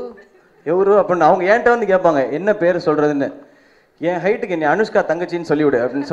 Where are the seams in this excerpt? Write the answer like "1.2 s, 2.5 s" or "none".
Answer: none